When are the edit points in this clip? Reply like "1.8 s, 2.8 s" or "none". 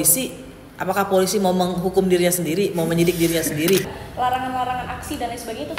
3.9 s